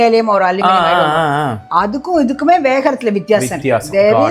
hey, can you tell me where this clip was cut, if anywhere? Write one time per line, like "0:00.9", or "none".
none